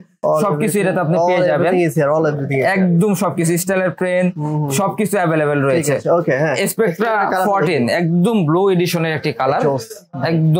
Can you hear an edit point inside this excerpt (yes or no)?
no